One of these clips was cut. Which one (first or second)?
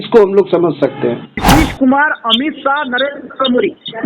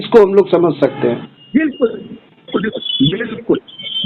first